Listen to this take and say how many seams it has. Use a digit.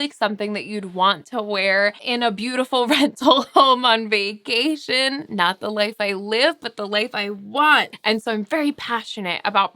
2